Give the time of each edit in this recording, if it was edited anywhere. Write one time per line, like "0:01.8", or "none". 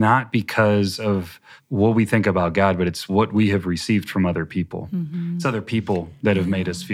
0:03.0